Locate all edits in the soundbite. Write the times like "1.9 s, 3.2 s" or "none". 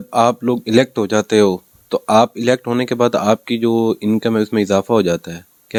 none